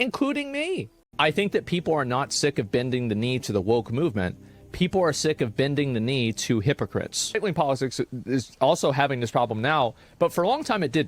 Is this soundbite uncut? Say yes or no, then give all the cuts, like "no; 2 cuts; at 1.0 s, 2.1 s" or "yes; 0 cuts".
no; 2 cuts; at 1.0 s, 7.4 s